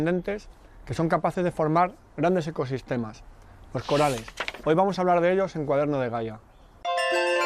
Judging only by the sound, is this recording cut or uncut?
cut